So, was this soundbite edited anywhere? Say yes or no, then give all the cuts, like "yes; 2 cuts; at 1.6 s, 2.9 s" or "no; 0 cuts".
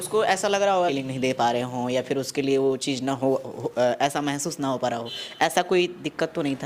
yes; 1 cut; at 0.9 s